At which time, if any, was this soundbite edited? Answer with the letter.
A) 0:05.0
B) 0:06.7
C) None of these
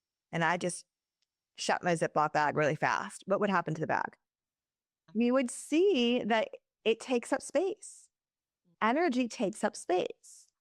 A